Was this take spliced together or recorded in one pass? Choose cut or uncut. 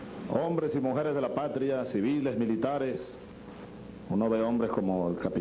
uncut